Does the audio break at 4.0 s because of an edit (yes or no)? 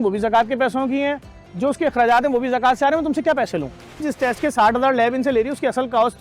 yes